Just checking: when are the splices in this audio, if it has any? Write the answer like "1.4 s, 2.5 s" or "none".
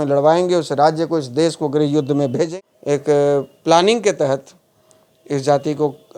2.5 s